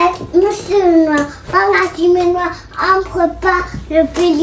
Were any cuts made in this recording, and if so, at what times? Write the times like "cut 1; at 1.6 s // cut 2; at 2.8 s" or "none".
none